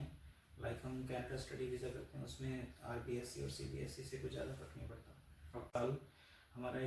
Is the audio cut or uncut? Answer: cut